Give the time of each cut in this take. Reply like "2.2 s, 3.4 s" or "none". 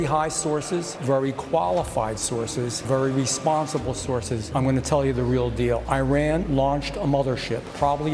none